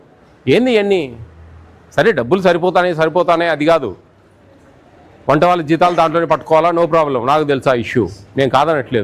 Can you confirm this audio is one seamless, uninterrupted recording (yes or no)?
yes